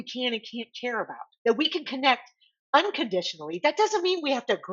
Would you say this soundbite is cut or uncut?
cut